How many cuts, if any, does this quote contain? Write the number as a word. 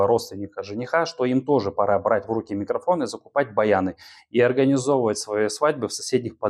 zero